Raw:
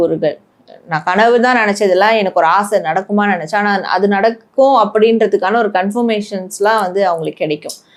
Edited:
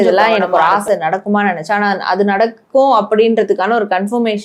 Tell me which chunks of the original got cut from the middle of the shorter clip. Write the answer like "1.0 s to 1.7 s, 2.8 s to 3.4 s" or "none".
none

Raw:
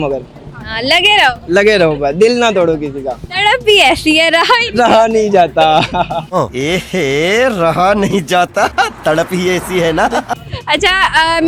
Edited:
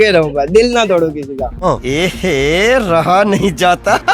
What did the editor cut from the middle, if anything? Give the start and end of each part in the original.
3.2 s to 6.3 s

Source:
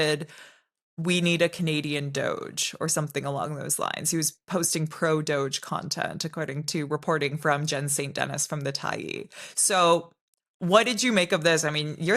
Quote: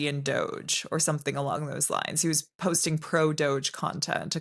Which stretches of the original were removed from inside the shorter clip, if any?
none

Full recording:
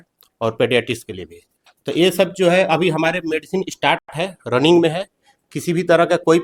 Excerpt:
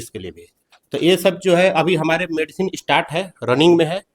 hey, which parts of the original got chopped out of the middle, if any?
4.0 s to 4.1 s

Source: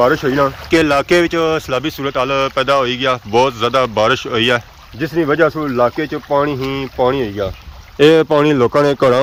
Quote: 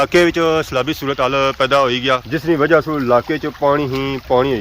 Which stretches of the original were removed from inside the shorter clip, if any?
3.2 s to 4.9 s

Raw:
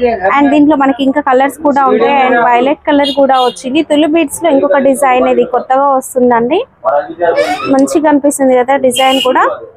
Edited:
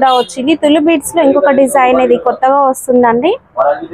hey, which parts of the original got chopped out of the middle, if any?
none

